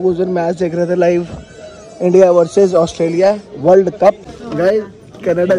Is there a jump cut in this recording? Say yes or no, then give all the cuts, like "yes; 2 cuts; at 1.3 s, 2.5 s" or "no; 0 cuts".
yes; 2 cuts; at 3.4 s, 4.3 s